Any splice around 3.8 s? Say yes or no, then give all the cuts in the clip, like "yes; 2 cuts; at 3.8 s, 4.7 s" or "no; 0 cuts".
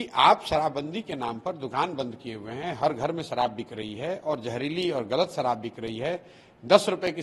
no; 0 cuts